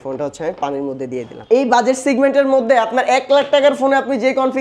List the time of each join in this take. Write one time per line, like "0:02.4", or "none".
0:01.4